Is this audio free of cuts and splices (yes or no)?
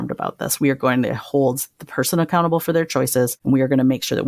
no